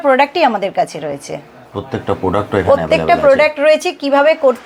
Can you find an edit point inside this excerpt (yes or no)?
no